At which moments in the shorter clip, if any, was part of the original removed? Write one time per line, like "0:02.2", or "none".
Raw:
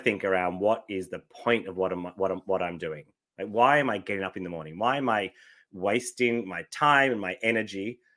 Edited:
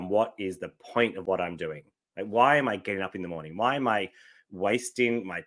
0:01.2